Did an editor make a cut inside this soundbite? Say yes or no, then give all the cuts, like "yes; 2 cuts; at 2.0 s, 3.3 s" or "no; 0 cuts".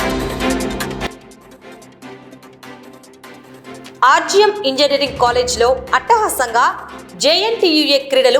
yes; 3 cuts; at 1.1 s, 2.9 s, 3.8 s